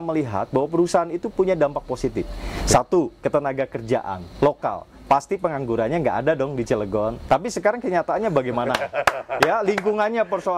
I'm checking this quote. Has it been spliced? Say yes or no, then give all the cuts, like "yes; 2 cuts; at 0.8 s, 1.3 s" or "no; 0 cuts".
no; 0 cuts